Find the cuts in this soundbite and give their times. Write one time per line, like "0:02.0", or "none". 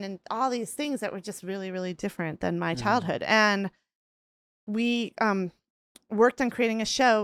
none